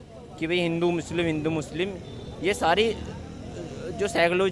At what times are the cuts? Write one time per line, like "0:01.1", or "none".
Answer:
none